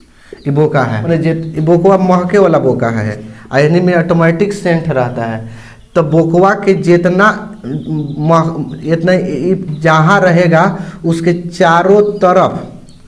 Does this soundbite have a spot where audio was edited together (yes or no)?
yes